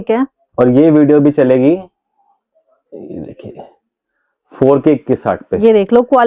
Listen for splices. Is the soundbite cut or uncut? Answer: uncut